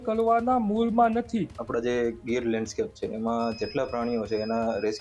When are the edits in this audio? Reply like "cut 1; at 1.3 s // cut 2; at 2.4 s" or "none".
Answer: cut 1; at 1.6 s